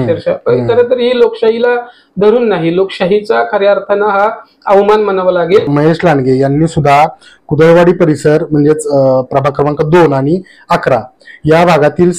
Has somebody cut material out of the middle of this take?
yes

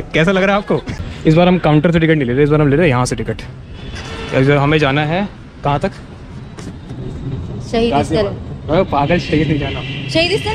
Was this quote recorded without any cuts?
no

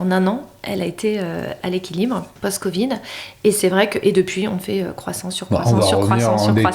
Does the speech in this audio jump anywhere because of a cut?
yes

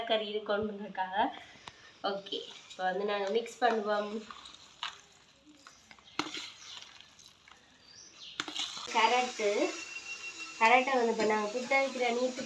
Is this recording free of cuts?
no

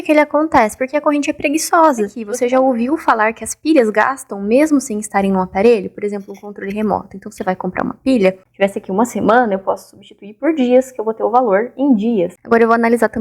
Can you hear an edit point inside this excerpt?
yes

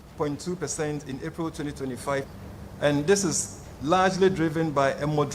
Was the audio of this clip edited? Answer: yes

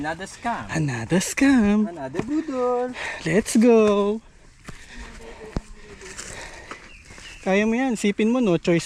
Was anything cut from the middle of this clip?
no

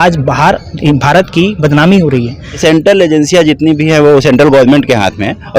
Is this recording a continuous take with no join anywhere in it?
no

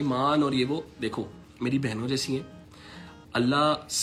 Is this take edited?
no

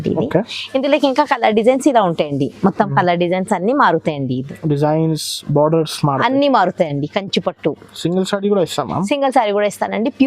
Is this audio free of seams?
yes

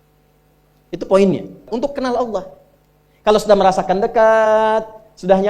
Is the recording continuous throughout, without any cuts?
no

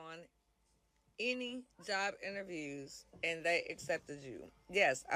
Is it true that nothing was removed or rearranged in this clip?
yes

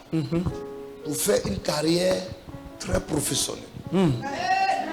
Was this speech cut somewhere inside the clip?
no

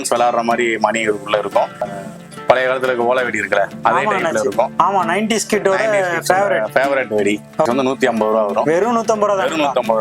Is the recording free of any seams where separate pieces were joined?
no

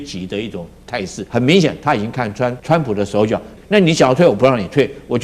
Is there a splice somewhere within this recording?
yes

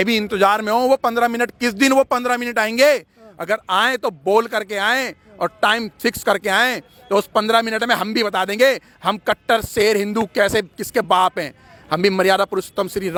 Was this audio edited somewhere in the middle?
no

